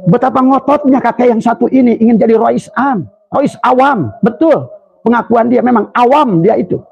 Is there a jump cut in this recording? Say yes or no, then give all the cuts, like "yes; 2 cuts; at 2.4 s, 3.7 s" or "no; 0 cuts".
yes; 1 cut; at 3.1 s